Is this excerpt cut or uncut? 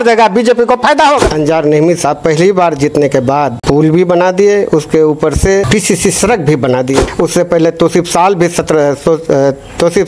cut